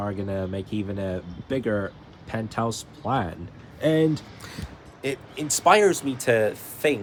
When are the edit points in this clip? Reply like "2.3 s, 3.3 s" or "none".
none